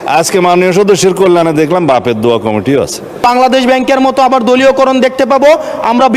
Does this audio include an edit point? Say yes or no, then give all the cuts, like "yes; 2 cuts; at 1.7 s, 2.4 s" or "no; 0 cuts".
yes; 1 cut; at 3.2 s